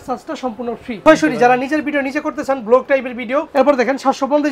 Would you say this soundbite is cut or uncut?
cut